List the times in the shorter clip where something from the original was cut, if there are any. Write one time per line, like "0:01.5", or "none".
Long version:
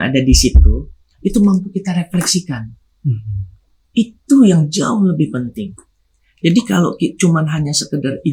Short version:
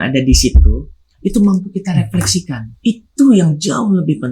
0:02.6